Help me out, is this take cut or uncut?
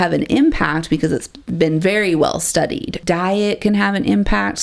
cut